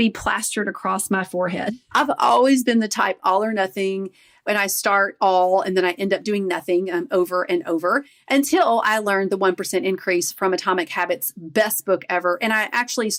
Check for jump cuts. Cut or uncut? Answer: uncut